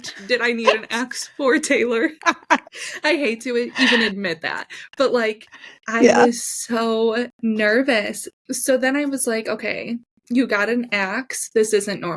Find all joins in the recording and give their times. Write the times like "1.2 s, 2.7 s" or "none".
none